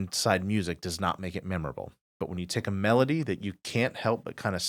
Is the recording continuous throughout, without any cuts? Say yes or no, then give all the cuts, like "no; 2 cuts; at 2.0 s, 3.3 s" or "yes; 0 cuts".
yes; 0 cuts